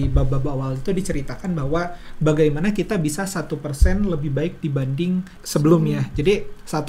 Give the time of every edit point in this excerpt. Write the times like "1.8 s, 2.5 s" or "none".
5.4 s